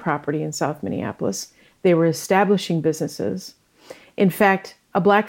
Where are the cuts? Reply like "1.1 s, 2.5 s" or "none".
none